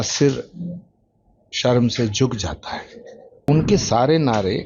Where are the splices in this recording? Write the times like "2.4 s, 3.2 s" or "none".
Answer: 3.5 s